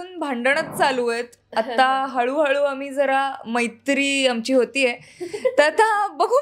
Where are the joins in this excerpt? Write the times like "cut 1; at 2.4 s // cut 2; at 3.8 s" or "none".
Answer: none

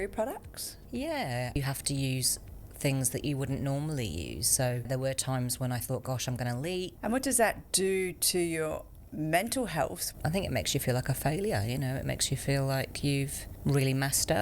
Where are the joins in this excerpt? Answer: cut 1; at 1.5 s // cut 2; at 4.9 s // cut 3; at 6.9 s // cut 4; at 7.6 s // cut 5; at 10.0 s // cut 6; at 13.4 s

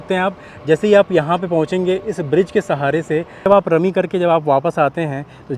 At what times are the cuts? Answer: cut 1; at 3.5 s

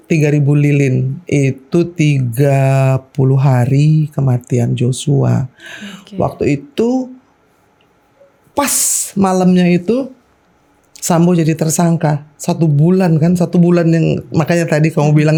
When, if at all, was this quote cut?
none

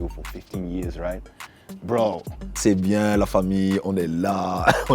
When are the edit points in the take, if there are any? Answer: cut 1; at 2.5 s

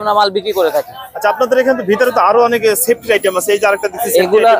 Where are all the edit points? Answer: none

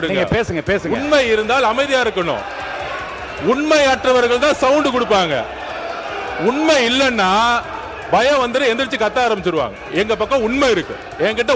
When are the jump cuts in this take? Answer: none

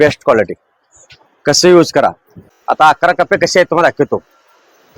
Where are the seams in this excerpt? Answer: cut 1; at 2.5 s

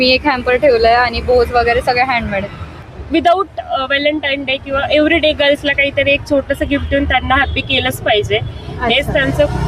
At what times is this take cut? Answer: cut 1; at 2.8 s

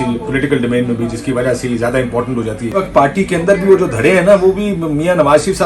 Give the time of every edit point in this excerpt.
cut 1; at 2.8 s

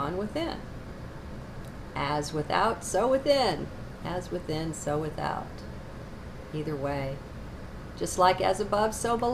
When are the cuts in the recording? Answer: cut 1; at 8.0 s

